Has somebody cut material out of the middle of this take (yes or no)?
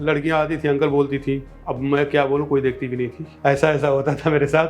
no